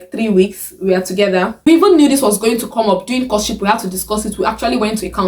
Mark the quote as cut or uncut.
cut